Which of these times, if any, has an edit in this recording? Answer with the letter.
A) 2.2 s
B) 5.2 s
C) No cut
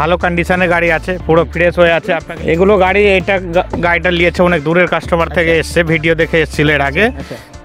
A